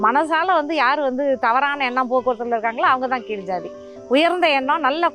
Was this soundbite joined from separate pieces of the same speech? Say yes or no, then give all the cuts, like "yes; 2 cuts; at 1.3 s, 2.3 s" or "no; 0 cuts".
no; 0 cuts